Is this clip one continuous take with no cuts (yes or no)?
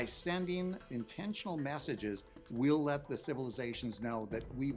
yes